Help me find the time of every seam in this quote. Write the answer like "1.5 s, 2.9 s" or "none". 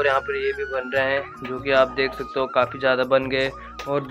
none